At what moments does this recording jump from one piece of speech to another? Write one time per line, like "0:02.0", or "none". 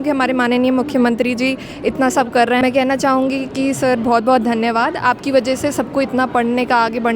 0:02.6